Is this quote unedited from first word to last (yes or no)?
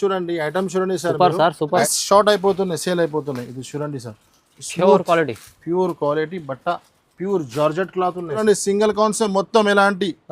no